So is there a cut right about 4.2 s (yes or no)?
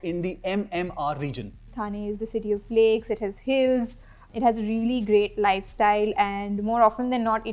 yes